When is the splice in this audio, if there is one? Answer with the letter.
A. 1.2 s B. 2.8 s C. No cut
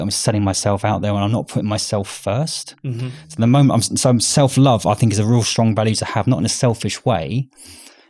C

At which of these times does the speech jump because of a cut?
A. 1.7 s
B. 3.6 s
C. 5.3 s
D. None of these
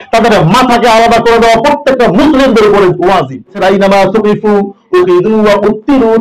B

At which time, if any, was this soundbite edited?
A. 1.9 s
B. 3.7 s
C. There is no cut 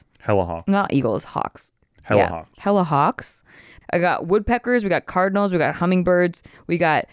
B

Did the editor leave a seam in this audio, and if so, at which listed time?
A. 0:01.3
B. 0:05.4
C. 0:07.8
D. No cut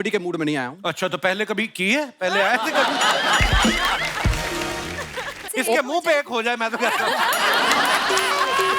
B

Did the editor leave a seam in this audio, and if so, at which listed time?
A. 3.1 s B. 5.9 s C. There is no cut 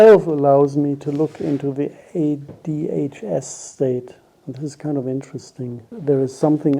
B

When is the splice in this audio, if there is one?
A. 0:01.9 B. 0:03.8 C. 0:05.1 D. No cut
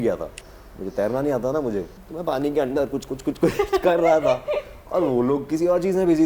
A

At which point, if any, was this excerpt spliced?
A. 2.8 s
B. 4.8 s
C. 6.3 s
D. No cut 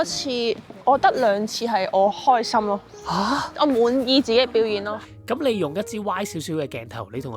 B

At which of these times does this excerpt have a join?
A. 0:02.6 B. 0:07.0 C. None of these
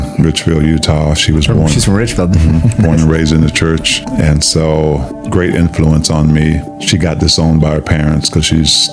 C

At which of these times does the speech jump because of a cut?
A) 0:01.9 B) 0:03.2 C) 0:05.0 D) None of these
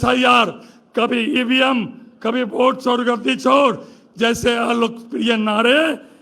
D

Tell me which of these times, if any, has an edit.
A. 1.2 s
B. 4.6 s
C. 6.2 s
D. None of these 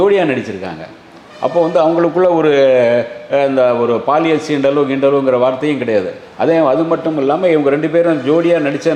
D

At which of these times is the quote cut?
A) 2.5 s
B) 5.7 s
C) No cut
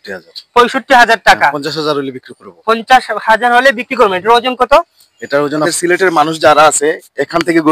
B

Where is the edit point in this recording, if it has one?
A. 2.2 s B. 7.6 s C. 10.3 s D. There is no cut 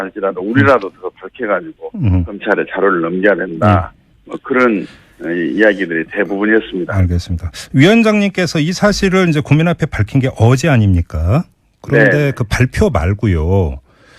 A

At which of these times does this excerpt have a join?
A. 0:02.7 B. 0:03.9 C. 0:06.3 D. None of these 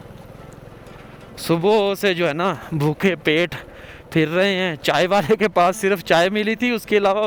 D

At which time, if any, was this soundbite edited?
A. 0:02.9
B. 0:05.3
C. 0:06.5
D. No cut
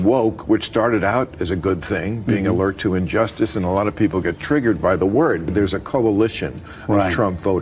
B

